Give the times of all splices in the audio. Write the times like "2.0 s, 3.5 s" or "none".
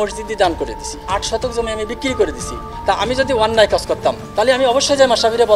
1.1 s, 2.7 s